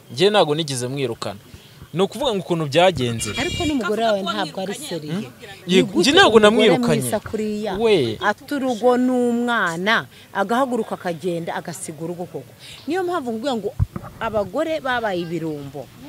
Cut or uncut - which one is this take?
uncut